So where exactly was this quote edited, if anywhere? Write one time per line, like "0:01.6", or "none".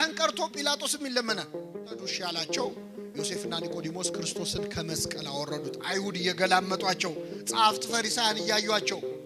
0:02.2